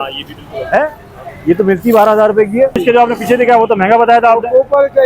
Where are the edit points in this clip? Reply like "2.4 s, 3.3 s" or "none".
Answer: 2.8 s

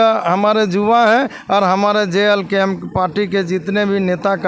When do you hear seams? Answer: none

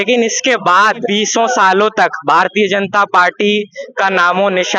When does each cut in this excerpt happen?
1.0 s

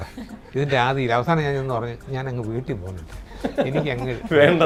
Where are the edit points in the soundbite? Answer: none

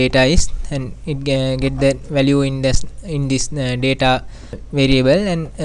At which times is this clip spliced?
4.6 s

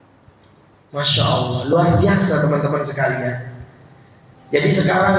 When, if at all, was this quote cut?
none

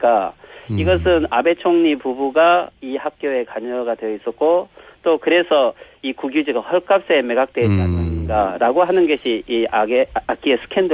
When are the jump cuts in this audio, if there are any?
8.0 s

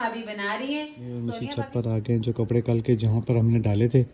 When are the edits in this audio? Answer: 1.4 s

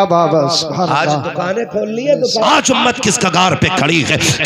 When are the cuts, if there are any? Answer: 2.4 s

